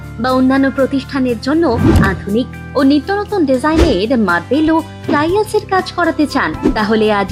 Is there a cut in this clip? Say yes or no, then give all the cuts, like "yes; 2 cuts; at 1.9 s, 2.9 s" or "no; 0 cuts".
no; 0 cuts